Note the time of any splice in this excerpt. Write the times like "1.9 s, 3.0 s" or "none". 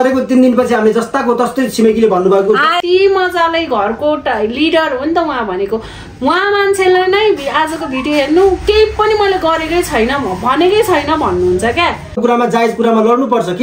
2.8 s, 12.2 s